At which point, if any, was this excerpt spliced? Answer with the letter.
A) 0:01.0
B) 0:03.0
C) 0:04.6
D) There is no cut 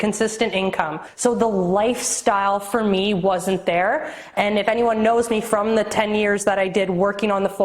A